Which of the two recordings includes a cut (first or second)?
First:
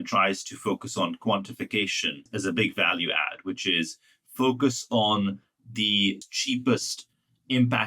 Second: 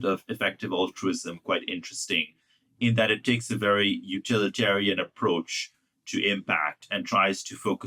first